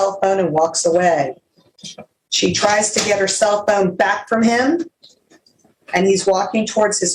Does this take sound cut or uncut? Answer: uncut